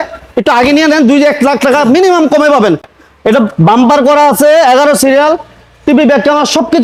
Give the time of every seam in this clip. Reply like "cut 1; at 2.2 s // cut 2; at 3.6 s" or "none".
none